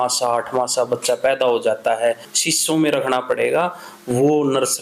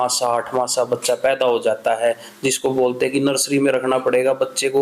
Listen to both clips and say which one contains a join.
first; 1 cut; at 2.3 s

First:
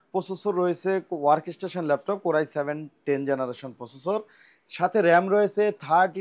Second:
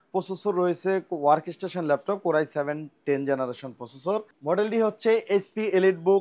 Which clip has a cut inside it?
second; 1 cut; at 4.3 s

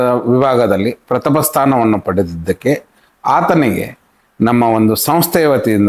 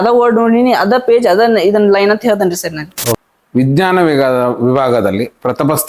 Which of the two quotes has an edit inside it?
second; 1 cut; at 3.2 s

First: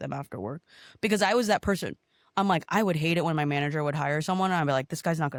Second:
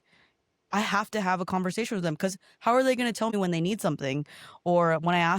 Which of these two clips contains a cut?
second; 1 cut; at 3.3 s

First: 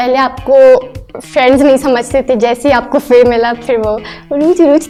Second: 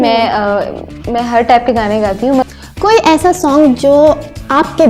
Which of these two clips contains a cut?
second; 1 cut; at 2.4 s

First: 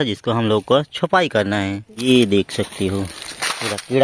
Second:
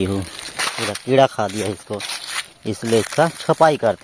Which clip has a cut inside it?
first; 1 cut; at 1.9 s

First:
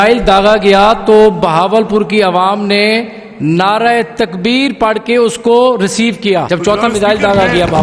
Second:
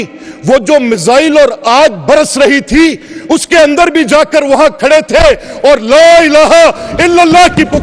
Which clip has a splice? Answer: first; 1 cut; at 6.5 s

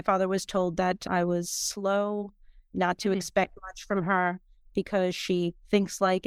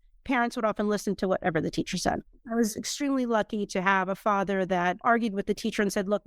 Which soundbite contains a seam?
second; 2 cuts; at 2.4 s, 5.0 s

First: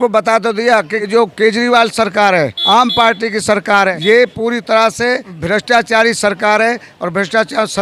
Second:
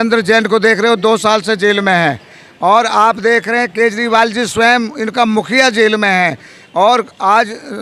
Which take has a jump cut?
first; 4 cuts; at 1.1 s, 2.6 s, 4.0 s, 5.3 s

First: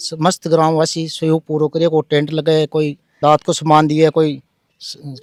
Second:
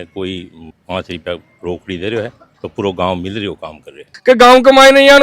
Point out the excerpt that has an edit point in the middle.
second; 1 cut; at 4.1 s

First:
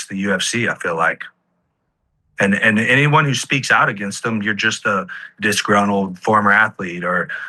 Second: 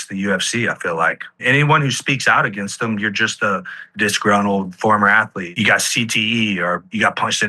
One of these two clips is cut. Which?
second; 2 cuts; at 1.4 s, 5.5 s

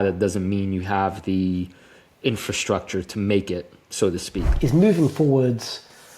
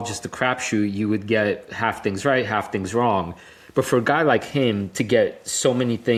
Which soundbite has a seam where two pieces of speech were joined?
first; 1 cut; at 4.4 s

